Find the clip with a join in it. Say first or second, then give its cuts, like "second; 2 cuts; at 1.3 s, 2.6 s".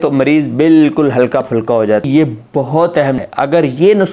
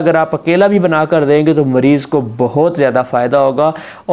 first; 2 cuts; at 2.0 s, 3.2 s